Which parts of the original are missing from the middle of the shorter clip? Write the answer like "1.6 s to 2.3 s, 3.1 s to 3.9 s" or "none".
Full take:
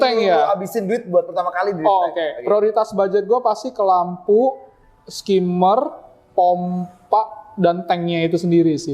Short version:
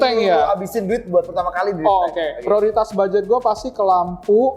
none